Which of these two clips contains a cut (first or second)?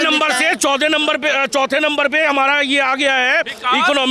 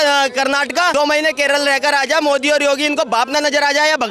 second